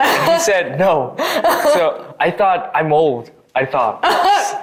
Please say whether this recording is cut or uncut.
uncut